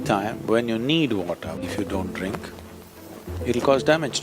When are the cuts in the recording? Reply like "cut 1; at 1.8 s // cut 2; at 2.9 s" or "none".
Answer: cut 1; at 1.6 s